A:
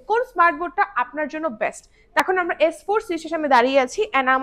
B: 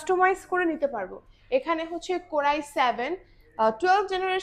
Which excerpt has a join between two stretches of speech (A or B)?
A